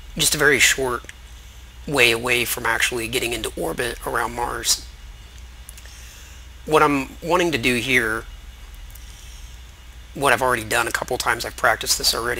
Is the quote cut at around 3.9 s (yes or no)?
yes